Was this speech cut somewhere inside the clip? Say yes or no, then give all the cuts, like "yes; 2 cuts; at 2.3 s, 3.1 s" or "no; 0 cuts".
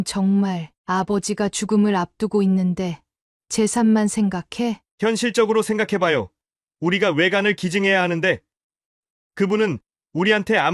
no; 0 cuts